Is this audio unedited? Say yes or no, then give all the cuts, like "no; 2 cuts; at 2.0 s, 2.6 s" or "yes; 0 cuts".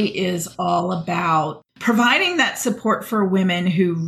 yes; 0 cuts